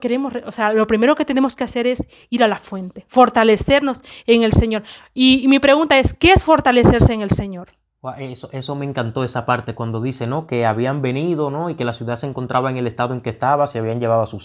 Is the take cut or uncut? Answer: uncut